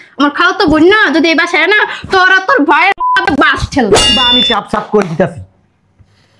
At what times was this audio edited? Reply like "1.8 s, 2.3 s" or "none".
4.3 s